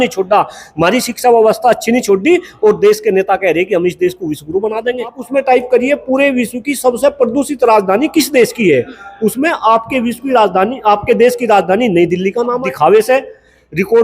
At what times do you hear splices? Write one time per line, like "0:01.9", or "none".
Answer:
0:05.2
0:12.6